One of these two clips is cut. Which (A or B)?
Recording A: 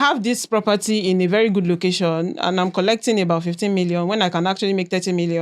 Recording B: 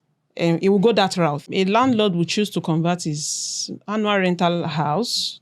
B